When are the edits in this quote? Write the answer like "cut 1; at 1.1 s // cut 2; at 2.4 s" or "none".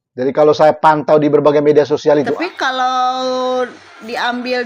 cut 1; at 2.4 s